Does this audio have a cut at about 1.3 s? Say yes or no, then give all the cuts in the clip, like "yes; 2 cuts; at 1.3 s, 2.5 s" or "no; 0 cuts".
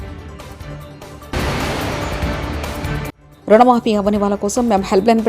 yes; 2 cuts; at 1.3 s, 3.2 s